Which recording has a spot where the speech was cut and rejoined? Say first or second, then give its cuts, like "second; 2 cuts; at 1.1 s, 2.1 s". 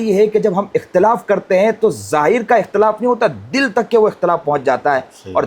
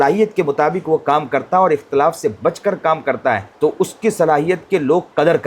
second; 1 cut; at 3.5 s